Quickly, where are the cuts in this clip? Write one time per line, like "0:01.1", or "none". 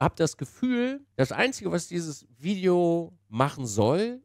0:01.0